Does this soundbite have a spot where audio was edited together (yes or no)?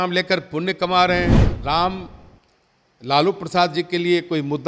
yes